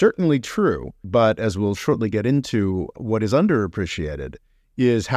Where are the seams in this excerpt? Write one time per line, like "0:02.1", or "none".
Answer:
0:01.0
0:02.9